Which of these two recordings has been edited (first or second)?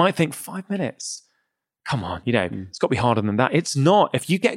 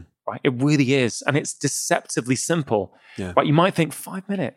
second